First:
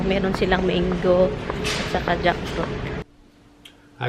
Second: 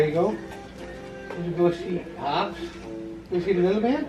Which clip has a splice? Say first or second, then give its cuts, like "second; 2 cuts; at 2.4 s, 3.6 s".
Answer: first; 1 cut; at 3.1 s